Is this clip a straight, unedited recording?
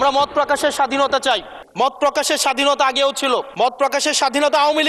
yes; 0 cuts

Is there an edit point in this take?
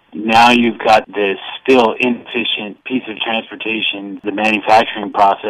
yes; 3 cuts; at 1.1 s, 2.8 s, 4.2 s

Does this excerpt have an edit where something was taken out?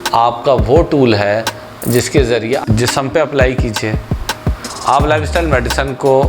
yes; 1 cut; at 2.6 s

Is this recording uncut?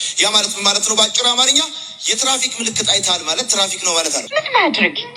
no; 1 cut; at 4.3 s

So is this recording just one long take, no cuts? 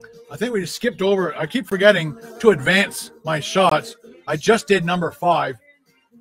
yes; 0 cuts

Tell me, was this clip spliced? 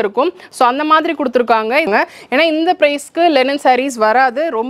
yes; 1 cut; at 1.9 s

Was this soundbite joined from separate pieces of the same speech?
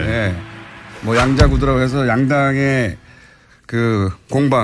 no; 0 cuts

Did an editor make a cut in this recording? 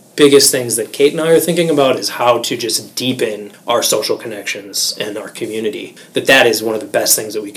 yes; 2 cuts; at 3.5 s, 5.9 s

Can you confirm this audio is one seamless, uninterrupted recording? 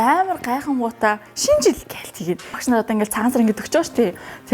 no; 1 cut; at 2.6 s

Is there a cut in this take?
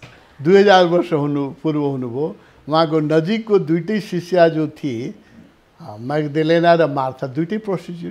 no; 0 cuts

